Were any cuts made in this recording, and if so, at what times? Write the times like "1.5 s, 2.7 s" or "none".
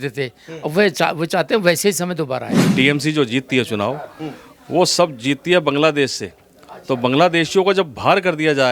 2.6 s